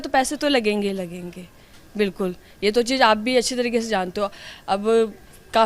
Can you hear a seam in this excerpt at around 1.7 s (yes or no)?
no